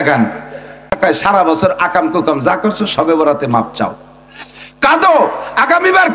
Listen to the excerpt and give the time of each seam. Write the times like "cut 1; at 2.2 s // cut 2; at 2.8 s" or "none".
cut 1; at 1.0 s